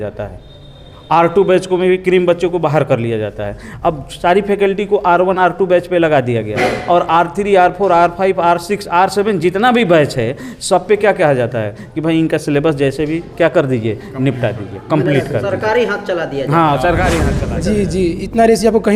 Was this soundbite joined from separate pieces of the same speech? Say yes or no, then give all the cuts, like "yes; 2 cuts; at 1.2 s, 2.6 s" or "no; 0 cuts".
yes; 1 cut; at 17.3 s